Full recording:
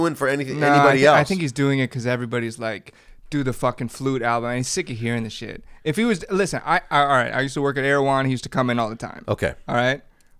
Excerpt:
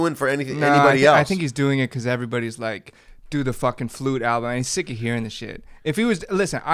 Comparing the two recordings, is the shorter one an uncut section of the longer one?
yes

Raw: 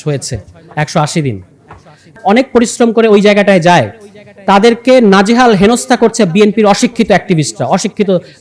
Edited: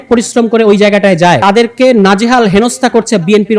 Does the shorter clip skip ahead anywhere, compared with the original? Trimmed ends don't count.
yes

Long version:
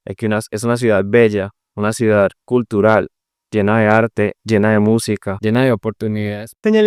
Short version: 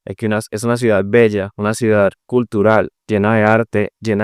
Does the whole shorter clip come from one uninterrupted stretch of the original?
no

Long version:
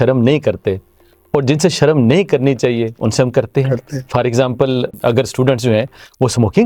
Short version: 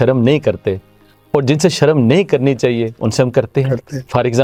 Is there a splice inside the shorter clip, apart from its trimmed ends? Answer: no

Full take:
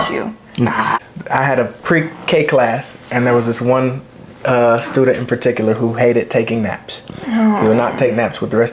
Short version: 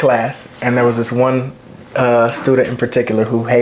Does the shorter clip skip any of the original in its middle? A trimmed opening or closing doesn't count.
no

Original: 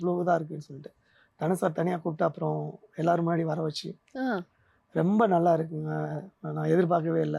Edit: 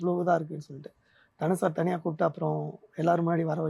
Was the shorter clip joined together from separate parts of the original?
no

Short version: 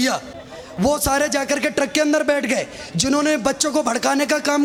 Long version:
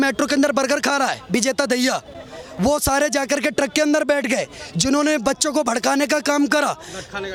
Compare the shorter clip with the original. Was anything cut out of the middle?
no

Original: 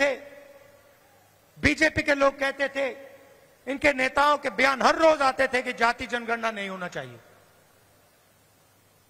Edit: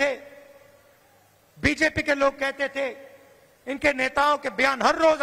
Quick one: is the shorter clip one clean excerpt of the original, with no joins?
yes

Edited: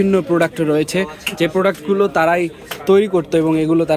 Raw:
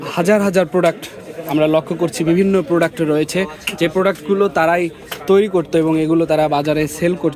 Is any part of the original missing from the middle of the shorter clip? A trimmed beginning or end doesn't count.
no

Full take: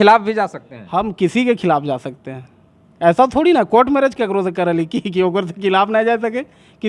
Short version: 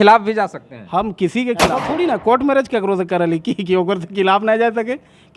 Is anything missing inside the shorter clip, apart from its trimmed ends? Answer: yes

